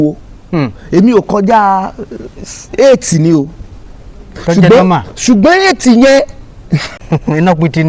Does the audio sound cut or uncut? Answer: cut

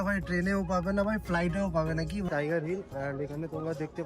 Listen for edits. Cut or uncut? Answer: cut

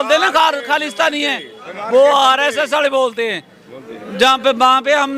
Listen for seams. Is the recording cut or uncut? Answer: uncut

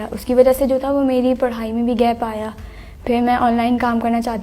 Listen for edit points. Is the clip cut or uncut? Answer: uncut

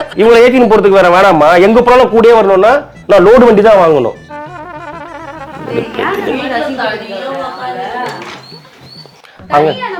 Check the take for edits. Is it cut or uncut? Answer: uncut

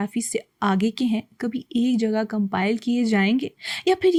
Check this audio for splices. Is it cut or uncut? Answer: uncut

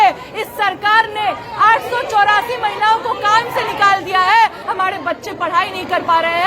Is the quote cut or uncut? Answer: cut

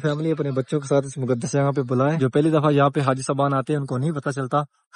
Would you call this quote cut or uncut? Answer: cut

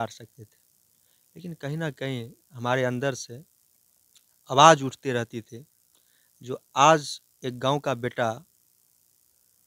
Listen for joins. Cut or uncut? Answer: uncut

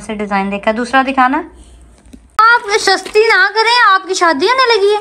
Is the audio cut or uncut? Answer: cut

